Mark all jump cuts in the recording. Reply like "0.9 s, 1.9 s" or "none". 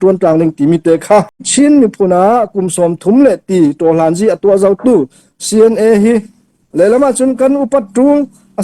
1.5 s